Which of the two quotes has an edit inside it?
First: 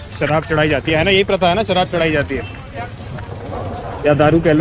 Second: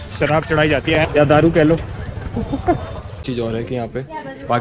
second; 2 cuts; at 0.9 s, 3.2 s

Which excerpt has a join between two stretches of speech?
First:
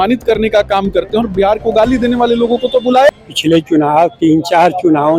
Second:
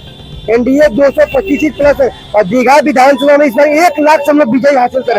first; 1 cut; at 3.1 s

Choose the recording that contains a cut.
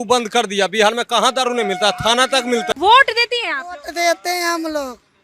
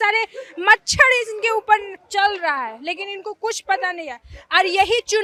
first; 1 cut; at 2.7 s

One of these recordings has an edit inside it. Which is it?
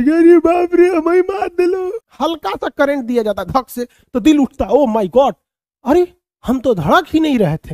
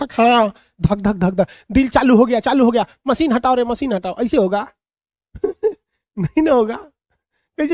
first; 1 cut; at 2.0 s

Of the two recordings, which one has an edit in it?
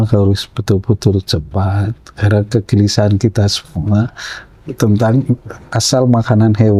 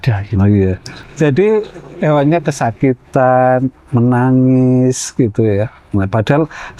second; 1 cut; at 0.9 s

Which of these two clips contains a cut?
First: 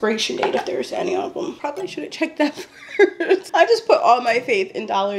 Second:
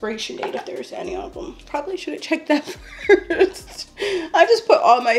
first; 2 cuts; at 1.6 s, 3.5 s

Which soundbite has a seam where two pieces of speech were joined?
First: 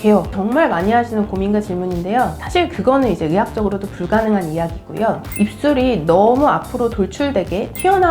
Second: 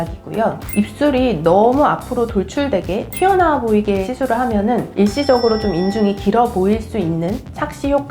first; 1 cut; at 2.4 s

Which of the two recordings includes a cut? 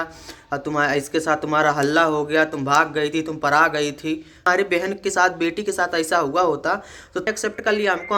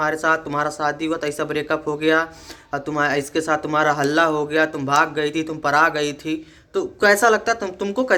first; 2 cuts; at 4.4 s, 7.3 s

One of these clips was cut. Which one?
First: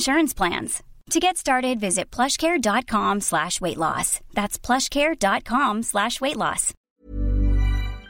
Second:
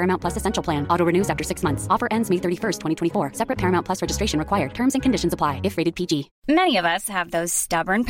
second; 1 cut; at 6.3 s

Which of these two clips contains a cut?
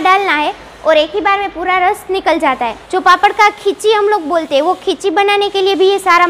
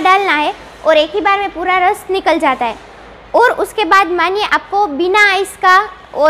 first; 1 cut; at 2.8 s

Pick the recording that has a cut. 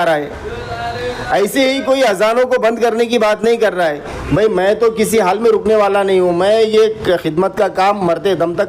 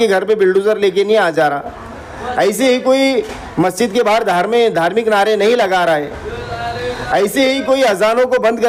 first; 1 cut; at 4.2 s

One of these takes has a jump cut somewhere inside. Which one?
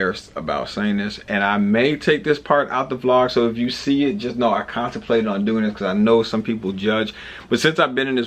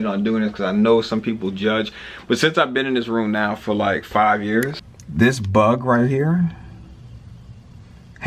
second; 1 cut; at 4.8 s

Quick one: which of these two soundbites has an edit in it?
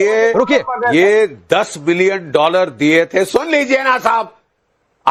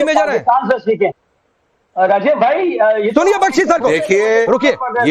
second; 1 cut; at 1.2 s

